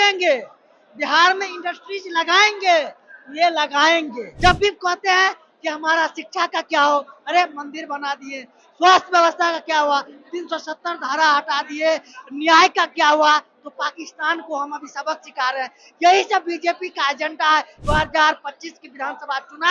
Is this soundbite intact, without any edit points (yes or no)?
no